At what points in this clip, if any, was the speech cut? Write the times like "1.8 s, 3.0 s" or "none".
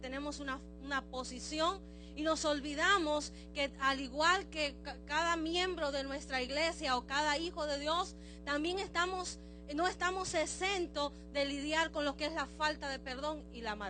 2.5 s